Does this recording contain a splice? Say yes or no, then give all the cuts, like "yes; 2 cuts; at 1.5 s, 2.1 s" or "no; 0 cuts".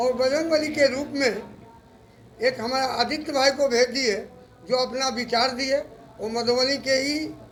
no; 0 cuts